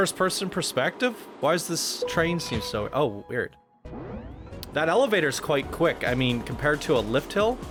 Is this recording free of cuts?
yes; 0 cuts

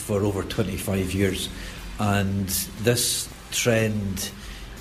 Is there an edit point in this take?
no; 0 cuts

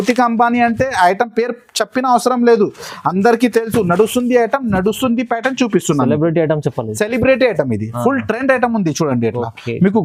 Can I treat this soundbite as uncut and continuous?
yes; 0 cuts

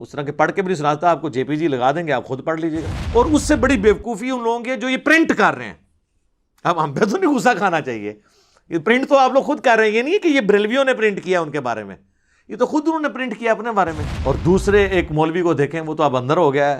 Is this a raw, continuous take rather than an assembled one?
no; 2 cuts; at 2.9 s, 14.1 s

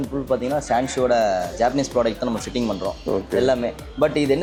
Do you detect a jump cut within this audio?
no; 0 cuts

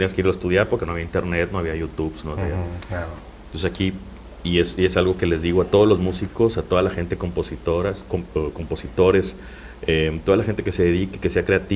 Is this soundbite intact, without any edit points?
yes; 0 cuts

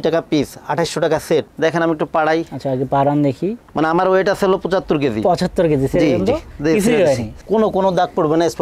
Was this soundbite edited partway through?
yes; 2 cuts; at 1.5 s, 3.6 s

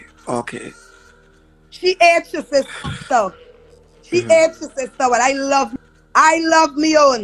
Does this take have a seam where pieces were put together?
yes; 1 cut; at 5.7 s

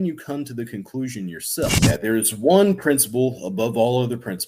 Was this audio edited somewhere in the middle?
yes; 1 cut; at 1.8 s

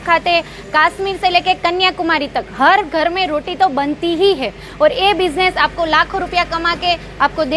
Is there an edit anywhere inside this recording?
no; 0 cuts

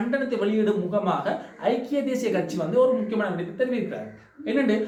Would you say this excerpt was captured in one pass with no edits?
yes; 0 cuts

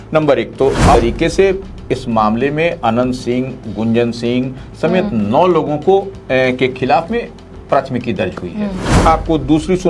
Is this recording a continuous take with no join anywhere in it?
no; 2 cuts; at 0.9 s, 9.0 s

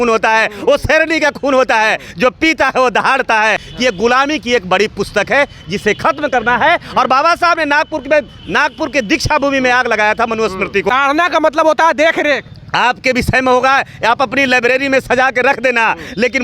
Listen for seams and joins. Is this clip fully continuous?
no; 2 cuts; at 3.7 s, 10.9 s

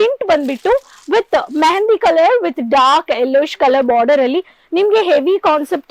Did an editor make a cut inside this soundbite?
no; 0 cuts

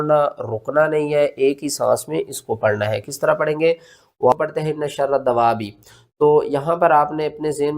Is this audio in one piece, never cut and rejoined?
no; 1 cut; at 4.3 s

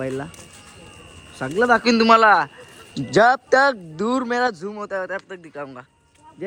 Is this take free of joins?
yes; 0 cuts

